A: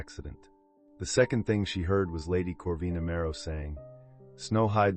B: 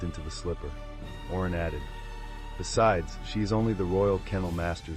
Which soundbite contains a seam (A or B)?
A